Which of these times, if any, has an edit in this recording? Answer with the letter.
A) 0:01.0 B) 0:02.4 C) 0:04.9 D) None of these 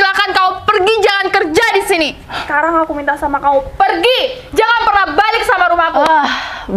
B